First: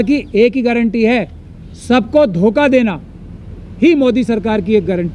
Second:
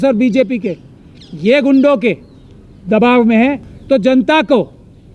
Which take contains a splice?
second; 1 cut; at 3.7 s

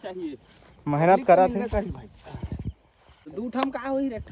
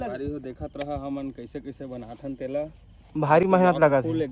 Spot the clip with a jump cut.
first; 1 cut; at 3.2 s

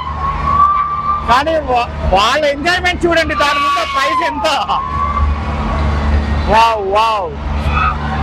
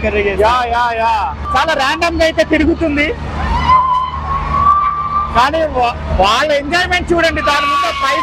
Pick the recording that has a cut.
second; 1 cut; at 1.5 s

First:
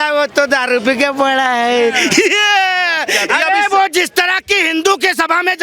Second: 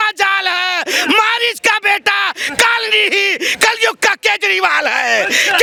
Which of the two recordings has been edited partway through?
first; 1 cut; at 3.2 s

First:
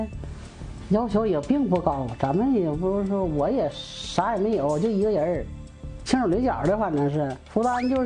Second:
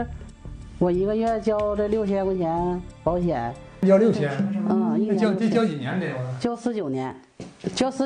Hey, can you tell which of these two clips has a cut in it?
second; 1 cut; at 3.8 s

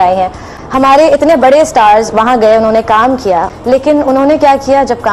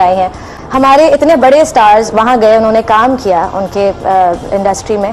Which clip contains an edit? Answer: first; 1 cut; at 3.5 s

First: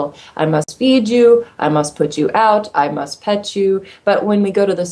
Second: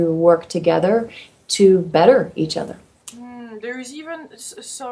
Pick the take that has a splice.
second; 1 cut; at 3.9 s

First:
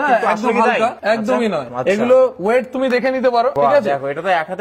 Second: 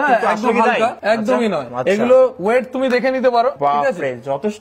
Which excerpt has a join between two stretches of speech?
second; 1 cut; at 3.5 s

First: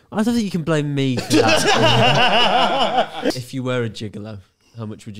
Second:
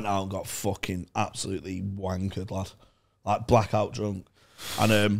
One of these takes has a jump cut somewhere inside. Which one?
first; 1 cut; at 3.3 s

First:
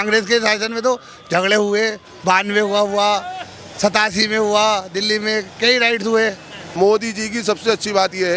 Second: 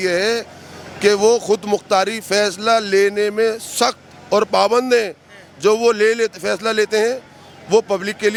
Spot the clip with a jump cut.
first; 1 cut; at 6.7 s

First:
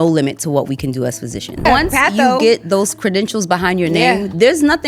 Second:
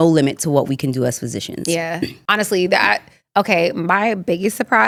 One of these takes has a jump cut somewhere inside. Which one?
first; 1 cut; at 1.6 s

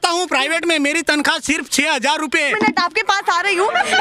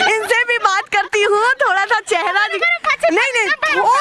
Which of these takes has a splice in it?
first; 1 cut; at 2.5 s

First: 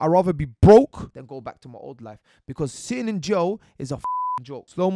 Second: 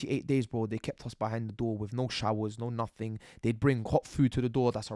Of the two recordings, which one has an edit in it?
first; 2 cuts; at 1.1 s, 4.0 s

